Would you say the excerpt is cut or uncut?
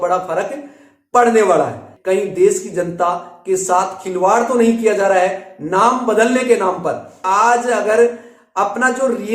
cut